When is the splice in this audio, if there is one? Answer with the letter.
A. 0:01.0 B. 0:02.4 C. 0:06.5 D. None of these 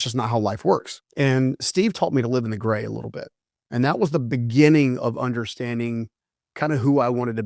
A